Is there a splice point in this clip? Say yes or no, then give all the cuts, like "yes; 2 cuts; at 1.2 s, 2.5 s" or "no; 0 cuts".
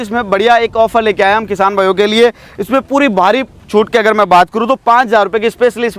no; 0 cuts